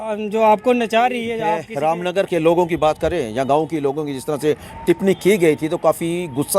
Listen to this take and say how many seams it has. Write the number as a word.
one